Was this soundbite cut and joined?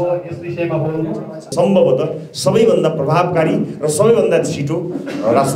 yes; 1 cut; at 1.5 s

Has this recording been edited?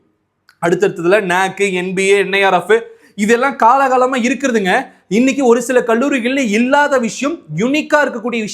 no; 0 cuts

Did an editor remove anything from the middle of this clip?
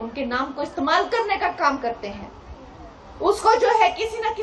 no; 0 cuts

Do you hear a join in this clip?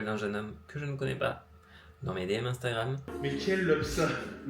yes; 1 cut; at 3.0 s

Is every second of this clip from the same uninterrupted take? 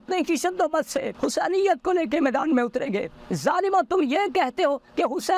no; 2 cuts; at 1.1 s, 3.2 s

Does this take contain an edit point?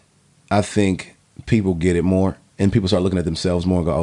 no; 0 cuts

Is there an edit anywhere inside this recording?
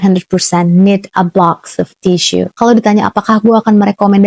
yes; 1 cut; at 2.5 s

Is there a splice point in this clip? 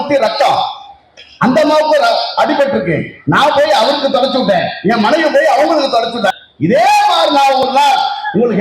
yes; 1 cut; at 6.3 s

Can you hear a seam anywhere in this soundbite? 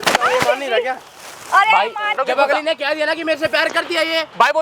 yes; 1 cut; at 2.2 s

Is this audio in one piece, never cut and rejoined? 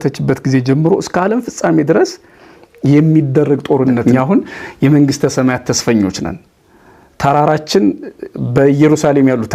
no; 1 cut; at 4.0 s

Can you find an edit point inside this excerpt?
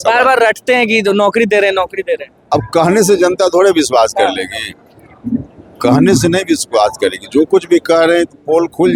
no; 0 cuts

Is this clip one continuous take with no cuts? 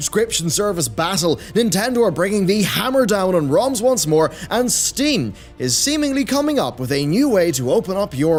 yes; 0 cuts

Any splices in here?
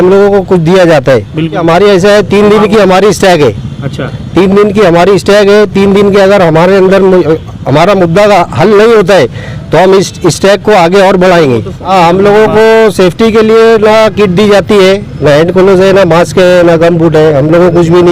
yes; 2 cuts; at 1.6 s, 11.8 s

